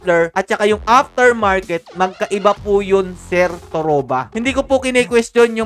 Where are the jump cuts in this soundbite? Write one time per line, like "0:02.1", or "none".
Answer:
0:04.3